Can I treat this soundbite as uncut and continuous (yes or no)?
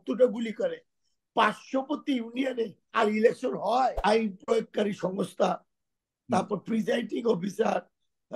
no